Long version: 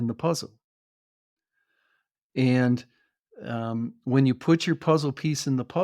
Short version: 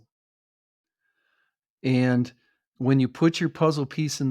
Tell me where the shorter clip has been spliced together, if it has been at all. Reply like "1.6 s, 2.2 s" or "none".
2.7 s